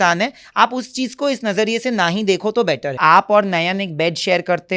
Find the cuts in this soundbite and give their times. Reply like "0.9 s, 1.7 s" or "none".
3.0 s